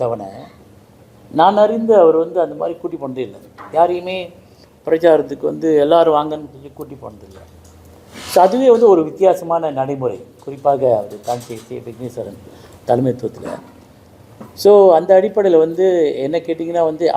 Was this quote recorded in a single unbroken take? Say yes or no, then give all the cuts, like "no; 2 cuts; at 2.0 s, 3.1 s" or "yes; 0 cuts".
yes; 0 cuts